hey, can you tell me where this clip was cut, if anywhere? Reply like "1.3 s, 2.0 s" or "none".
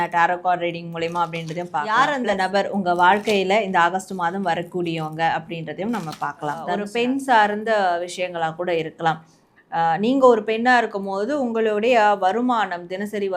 1.9 s, 6.9 s